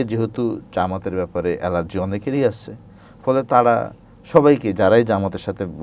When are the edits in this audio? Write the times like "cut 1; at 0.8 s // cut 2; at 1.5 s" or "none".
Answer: none